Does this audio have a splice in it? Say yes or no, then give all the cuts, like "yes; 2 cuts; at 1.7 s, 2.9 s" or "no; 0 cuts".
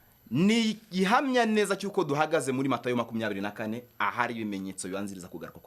no; 0 cuts